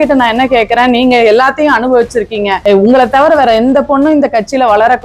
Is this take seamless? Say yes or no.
no